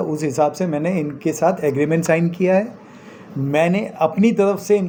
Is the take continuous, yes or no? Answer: yes